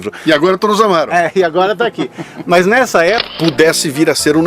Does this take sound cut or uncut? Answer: cut